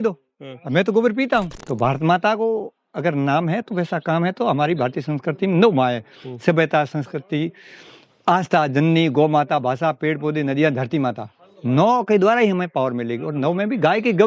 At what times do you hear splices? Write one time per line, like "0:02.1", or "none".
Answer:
0:01.6

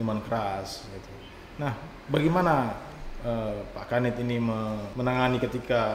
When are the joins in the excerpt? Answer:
0:04.9

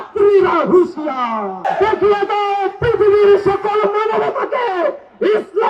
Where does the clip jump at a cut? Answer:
0:01.7

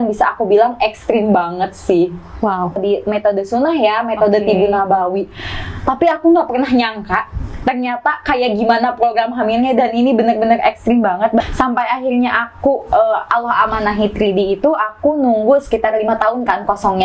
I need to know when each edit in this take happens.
0:02.8
0:11.4

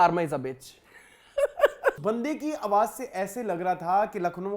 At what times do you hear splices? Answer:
0:02.0

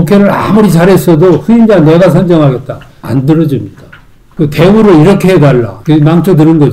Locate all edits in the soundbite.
0:04.3
0:05.8

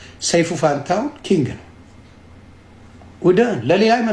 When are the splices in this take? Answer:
none

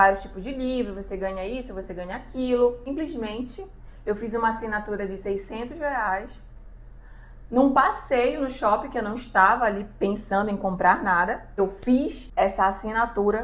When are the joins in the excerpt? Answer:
0:02.8
0:11.6
0:12.2

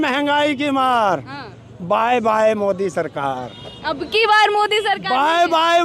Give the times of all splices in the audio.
none

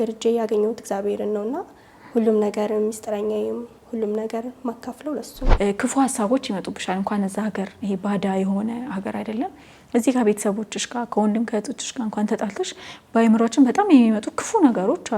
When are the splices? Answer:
0:05.5

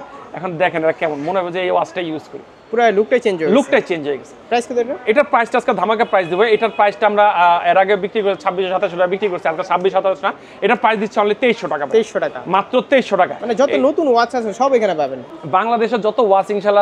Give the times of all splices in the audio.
none

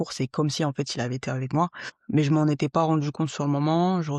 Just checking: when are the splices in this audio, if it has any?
0:01.9

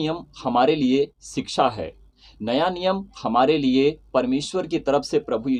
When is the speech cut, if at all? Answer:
none

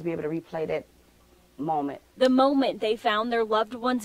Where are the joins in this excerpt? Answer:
0:02.4

